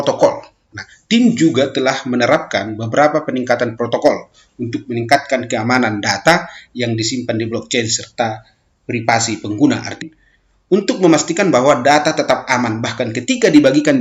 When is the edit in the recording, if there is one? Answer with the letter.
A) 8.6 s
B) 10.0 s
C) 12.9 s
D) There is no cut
B